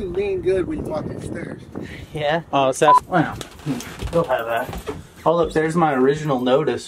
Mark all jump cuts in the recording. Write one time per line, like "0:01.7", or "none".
0:03.0